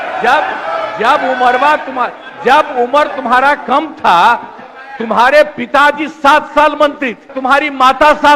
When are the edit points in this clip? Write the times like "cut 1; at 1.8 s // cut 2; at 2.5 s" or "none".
cut 1; at 7.3 s